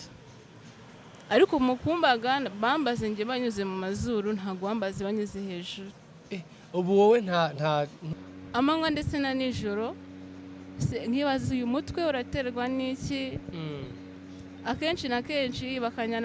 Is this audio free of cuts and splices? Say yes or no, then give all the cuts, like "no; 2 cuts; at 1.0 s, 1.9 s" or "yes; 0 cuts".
no; 1 cut; at 8.0 s